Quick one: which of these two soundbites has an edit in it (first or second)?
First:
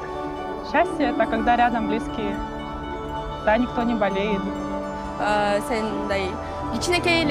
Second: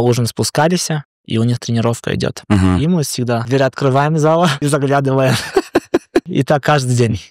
second